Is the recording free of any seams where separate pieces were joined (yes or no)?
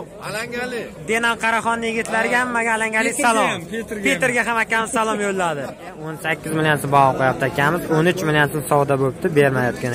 no